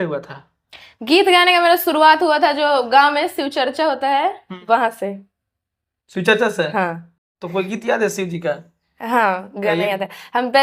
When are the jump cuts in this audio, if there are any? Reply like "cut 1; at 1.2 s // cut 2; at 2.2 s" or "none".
none